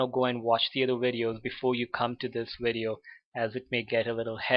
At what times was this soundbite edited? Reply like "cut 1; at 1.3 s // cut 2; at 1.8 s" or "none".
none